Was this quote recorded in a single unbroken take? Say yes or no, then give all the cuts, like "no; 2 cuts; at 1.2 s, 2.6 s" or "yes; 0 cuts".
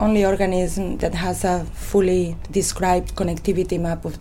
no; 2 cuts; at 1.0 s, 2.4 s